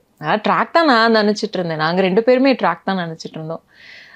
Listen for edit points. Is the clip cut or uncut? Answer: uncut